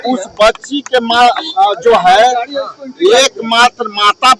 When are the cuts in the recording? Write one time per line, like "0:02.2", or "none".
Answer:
none